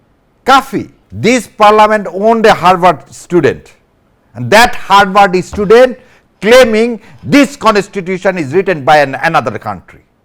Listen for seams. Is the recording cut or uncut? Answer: cut